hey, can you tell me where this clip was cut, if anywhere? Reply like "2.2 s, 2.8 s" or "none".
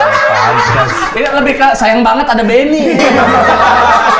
none